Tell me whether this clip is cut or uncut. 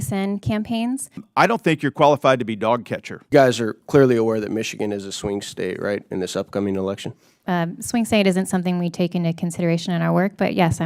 cut